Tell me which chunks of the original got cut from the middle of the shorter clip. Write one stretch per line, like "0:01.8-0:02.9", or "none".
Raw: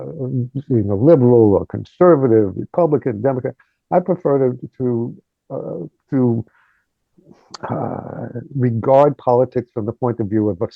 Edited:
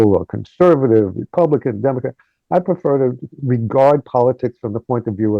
0:04.7-0:08.4